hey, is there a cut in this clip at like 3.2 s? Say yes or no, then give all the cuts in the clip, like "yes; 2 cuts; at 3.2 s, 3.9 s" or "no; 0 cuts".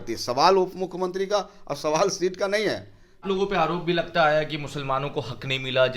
yes; 1 cut; at 3.2 s